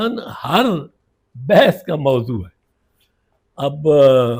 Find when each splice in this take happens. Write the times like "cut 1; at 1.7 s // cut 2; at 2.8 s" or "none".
none